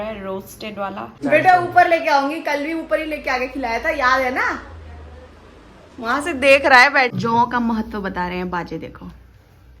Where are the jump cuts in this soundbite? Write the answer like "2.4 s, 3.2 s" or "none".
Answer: 1.1 s, 7.1 s